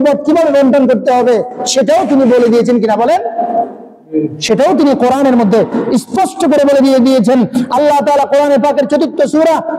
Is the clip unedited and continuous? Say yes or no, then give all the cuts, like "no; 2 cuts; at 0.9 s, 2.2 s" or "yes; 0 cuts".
yes; 0 cuts